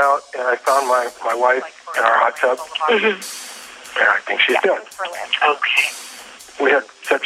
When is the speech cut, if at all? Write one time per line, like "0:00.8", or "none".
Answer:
0:06.3